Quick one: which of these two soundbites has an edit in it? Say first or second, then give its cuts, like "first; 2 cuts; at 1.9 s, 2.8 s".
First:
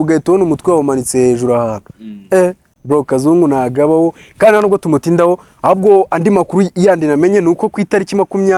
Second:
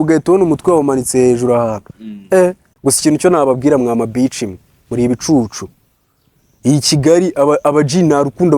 second; 1 cut; at 2.7 s